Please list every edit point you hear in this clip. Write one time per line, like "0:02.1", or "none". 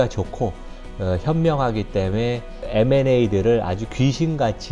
0:02.6